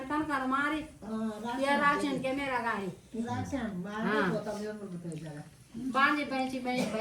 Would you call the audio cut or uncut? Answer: uncut